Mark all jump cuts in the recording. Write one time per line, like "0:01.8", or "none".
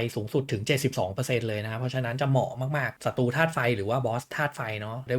0:03.0